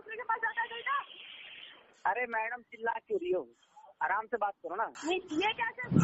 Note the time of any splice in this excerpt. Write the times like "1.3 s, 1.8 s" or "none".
5.0 s